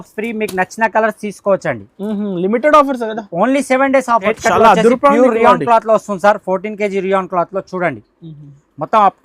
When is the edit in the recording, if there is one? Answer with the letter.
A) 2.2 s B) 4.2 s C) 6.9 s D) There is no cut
B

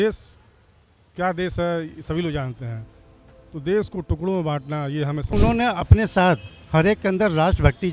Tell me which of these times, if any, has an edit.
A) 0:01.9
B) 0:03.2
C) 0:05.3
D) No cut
C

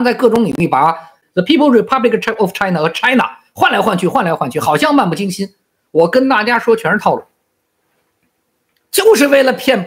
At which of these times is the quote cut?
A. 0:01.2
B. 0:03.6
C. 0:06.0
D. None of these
A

